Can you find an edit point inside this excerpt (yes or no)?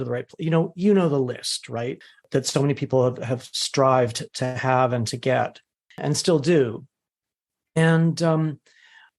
yes